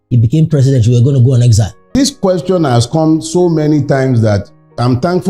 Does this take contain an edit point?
yes; 1 cut; at 1.9 s

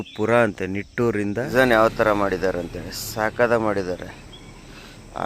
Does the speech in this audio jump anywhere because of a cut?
yes; 1 cut; at 1.5 s

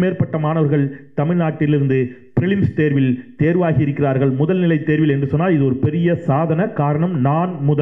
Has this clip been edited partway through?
no; 0 cuts

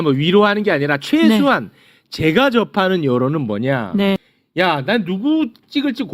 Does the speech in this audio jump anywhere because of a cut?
yes; 1 cut; at 4.4 s

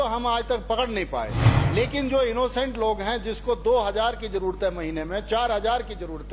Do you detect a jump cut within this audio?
yes; 1 cut; at 1.4 s

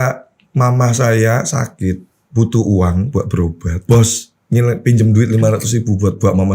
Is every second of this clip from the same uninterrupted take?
no; 2 cuts; at 2.1 s, 3.8 s

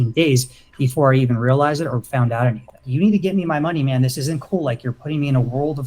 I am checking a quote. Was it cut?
yes; 1 cut; at 2.8 s

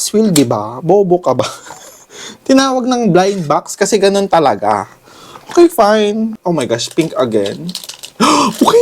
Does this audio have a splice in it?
yes; 1 cut; at 6.4 s

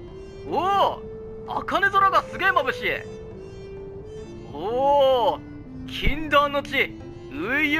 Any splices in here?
no; 0 cuts

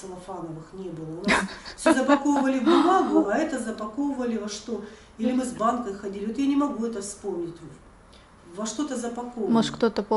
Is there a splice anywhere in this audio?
no; 0 cuts

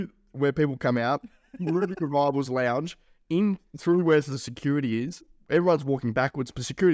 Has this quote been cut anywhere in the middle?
no; 0 cuts

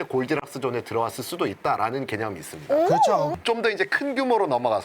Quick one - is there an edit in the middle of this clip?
yes; 1 cut; at 3.3 s

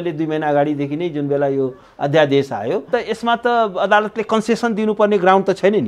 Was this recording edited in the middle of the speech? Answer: yes; 1 cut; at 2.9 s

